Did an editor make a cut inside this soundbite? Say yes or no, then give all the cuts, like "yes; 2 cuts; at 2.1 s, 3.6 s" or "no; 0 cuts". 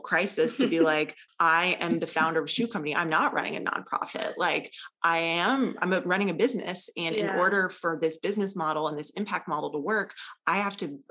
yes; 1 cut; at 1.2 s